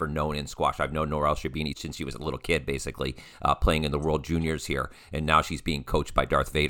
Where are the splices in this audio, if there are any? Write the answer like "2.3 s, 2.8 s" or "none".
1.8 s